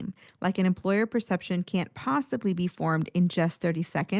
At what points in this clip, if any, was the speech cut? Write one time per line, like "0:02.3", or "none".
none